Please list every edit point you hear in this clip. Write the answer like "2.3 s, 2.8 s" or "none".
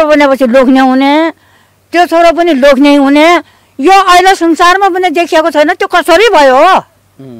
none